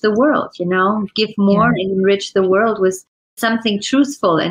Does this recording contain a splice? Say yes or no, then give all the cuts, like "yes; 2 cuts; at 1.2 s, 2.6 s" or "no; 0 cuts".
yes; 1 cut; at 3.4 s